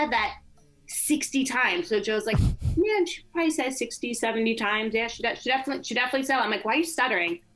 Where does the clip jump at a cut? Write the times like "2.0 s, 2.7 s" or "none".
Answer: none